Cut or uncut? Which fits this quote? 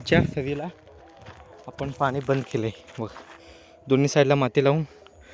uncut